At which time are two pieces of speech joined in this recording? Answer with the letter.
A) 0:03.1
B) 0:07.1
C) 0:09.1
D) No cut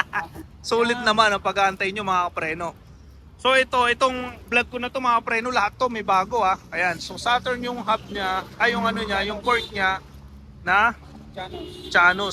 D